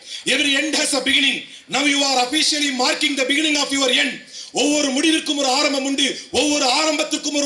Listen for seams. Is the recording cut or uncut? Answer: uncut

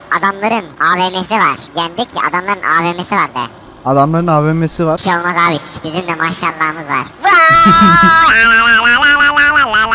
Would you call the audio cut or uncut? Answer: uncut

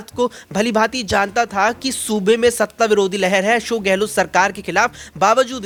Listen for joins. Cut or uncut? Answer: uncut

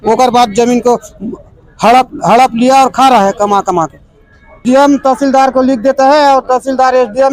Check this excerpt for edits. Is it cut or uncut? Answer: cut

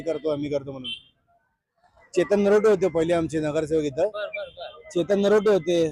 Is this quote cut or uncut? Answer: uncut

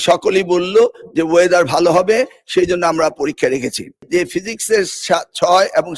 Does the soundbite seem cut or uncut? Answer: cut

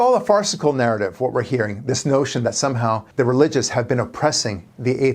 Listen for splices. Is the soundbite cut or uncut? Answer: cut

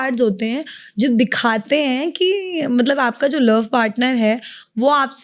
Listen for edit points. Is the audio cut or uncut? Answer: uncut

